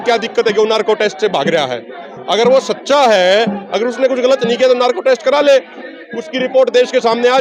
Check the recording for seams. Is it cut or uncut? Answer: uncut